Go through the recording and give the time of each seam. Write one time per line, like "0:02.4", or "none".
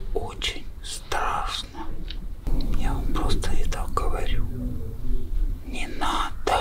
0:02.5